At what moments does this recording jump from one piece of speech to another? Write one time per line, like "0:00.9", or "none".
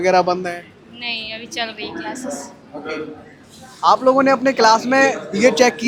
none